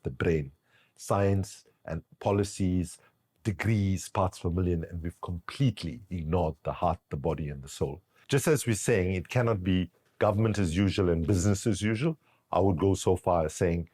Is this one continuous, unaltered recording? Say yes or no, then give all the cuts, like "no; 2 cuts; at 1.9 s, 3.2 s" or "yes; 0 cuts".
no; 1 cut; at 8.1 s